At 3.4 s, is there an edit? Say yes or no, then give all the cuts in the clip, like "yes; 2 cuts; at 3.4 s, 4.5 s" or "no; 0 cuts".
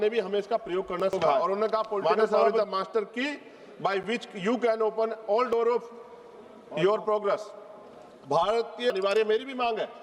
no; 2 cuts; at 1.3 s, 8.9 s